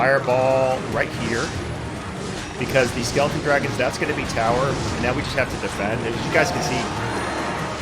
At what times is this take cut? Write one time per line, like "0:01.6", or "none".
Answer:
none